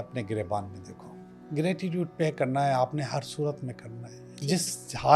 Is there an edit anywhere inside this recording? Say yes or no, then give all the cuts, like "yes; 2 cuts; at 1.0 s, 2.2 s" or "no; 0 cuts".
yes; 1 cut; at 1.4 s